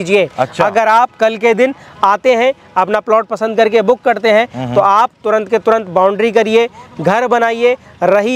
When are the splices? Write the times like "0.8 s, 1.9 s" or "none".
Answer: none